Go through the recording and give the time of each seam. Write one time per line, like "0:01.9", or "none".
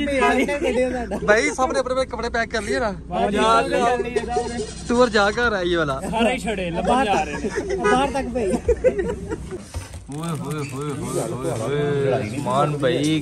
0:09.6